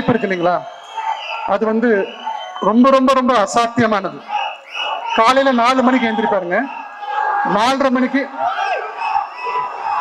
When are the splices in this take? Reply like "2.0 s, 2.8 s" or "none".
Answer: none